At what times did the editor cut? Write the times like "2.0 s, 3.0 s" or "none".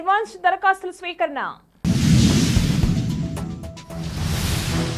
none